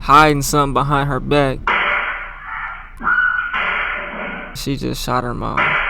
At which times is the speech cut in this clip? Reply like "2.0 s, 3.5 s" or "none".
1.6 s, 2.8 s, 4.6 s